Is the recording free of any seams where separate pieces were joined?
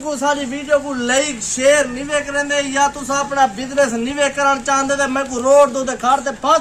yes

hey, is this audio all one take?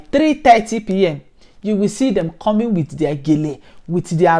yes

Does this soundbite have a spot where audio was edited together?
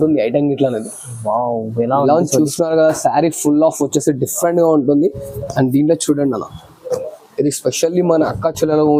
no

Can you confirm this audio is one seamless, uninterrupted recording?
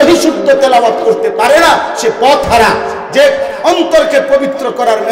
yes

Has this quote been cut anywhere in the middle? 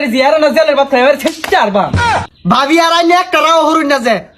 yes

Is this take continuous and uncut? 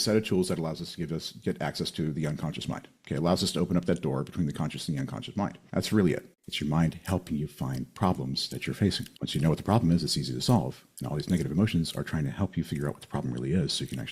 no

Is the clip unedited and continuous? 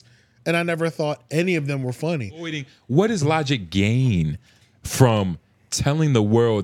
no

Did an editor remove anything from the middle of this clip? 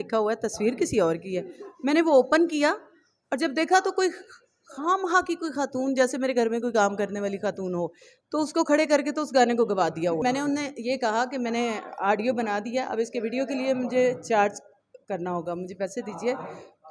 yes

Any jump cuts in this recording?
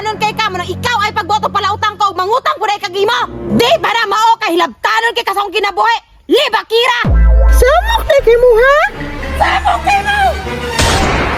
no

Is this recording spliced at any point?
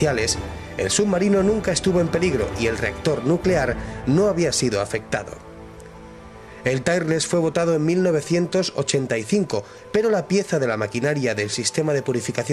yes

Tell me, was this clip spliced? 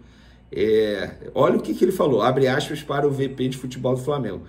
no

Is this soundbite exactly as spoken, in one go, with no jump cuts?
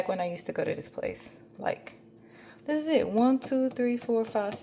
yes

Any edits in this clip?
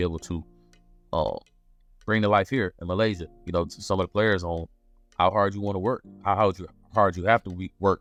no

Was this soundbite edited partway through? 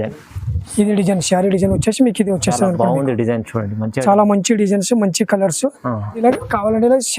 yes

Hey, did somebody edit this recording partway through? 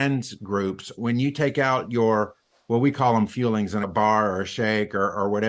yes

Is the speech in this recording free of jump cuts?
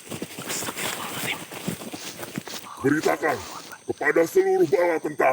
no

